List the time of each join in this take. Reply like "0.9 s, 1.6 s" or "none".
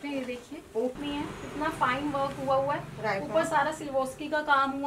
1.0 s